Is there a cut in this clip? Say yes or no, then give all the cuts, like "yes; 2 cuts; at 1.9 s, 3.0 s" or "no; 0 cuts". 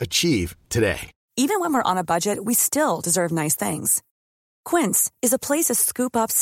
yes; 1 cut; at 1.1 s